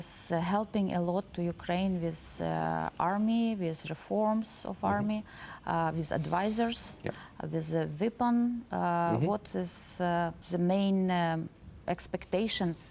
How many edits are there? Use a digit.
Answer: 0